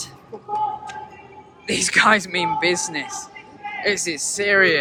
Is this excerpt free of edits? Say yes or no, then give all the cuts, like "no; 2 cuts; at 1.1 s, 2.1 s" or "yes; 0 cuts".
yes; 0 cuts